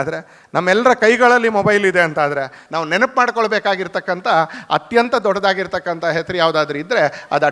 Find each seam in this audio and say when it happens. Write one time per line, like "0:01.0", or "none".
0:02.6